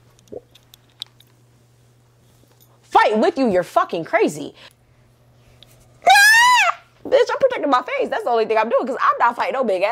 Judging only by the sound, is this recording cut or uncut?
cut